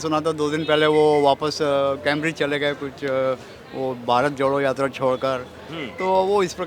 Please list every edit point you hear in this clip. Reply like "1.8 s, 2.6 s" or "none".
none